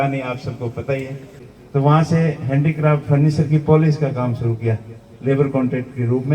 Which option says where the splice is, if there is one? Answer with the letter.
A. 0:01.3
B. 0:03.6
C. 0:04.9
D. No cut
A